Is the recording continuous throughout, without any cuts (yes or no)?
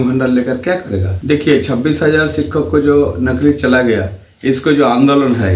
no